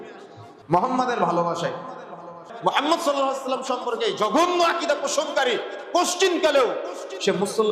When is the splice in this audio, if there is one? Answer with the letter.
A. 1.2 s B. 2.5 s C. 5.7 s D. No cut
B